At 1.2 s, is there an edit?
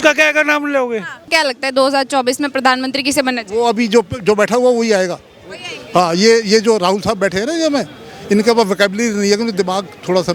yes; 1 cut; at 1.2 s

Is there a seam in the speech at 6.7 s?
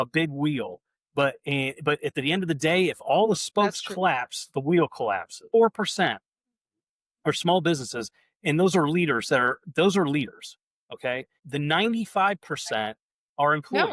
no; 2 cuts; at 5.4 s, 11.3 s

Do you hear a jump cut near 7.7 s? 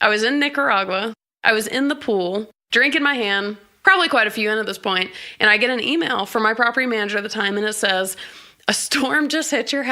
no; 3 cuts; at 1.2 s, 2.6 s, 3.7 s

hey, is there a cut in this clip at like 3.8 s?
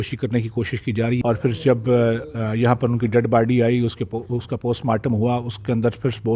no; 1 cut; at 1.2 s

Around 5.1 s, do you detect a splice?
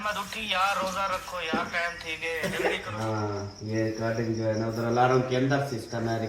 no; 1 cut; at 2.9 s

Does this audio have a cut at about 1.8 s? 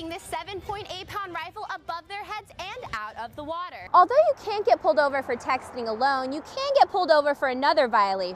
no; 1 cut; at 3.8 s

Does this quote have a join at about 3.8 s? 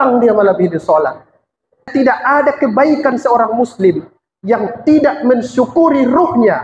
no; 1 cut; at 1.9 s

